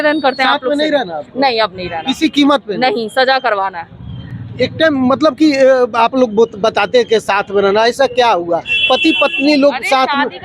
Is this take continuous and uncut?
yes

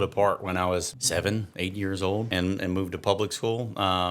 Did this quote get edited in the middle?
yes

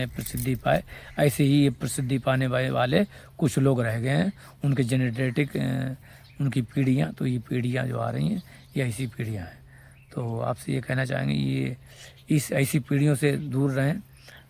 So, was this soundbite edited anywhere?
no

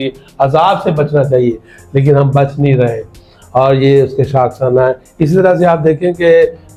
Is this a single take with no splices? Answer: yes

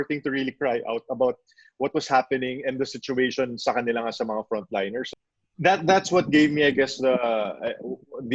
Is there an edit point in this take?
yes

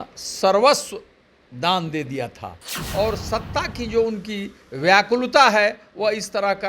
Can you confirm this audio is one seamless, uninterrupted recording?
no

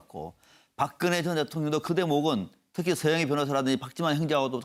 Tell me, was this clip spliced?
no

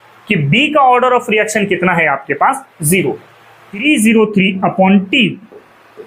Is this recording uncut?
no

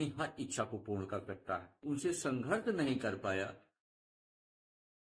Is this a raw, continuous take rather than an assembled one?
no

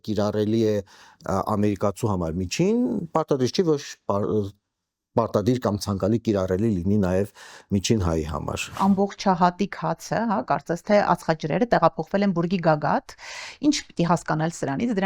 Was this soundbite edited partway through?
yes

